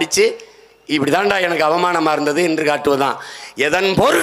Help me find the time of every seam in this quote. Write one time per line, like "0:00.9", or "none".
none